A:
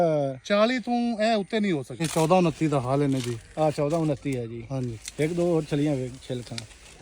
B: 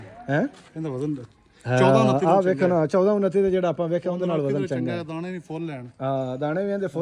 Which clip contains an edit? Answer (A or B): A